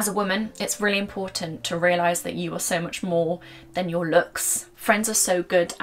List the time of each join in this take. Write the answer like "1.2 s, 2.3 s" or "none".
none